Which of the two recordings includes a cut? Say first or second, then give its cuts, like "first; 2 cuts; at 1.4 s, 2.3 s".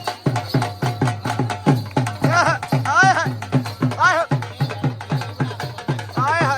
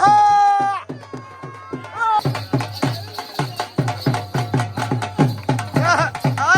second; 1 cut; at 2.2 s